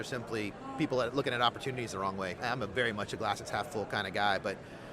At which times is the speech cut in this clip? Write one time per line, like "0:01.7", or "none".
0:02.4